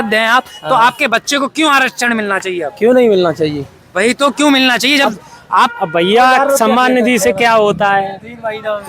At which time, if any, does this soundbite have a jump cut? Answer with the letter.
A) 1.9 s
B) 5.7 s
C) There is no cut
B